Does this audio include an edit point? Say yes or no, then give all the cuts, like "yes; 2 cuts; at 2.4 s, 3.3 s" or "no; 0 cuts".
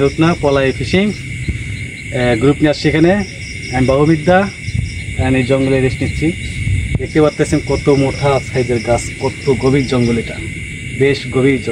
no; 0 cuts